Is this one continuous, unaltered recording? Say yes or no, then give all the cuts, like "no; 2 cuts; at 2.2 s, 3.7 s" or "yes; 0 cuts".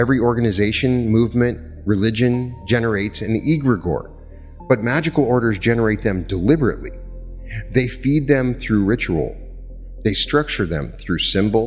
yes; 0 cuts